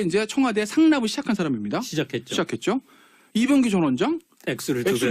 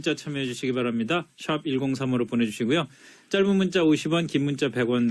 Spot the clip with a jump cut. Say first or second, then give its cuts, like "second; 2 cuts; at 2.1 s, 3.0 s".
first; 1 cut; at 4.0 s